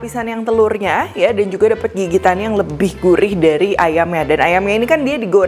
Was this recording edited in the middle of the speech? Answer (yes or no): no